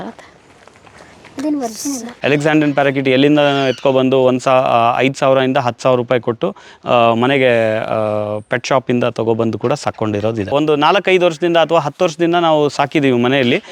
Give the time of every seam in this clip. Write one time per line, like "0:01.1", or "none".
0:02.1
0:10.5